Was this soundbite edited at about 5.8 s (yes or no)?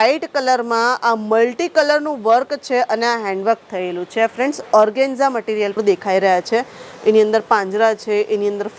yes